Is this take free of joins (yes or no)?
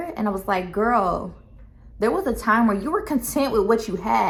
yes